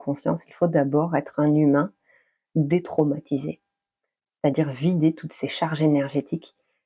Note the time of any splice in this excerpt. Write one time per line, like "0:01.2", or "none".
none